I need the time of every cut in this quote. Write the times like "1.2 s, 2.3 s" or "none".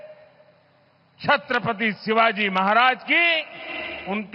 none